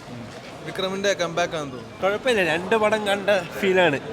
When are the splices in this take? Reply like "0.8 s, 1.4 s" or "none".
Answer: 1.9 s